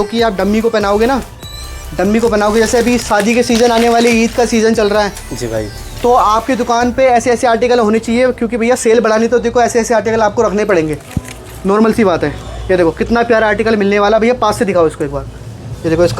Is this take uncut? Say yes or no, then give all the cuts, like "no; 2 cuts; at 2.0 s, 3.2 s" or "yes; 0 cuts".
yes; 0 cuts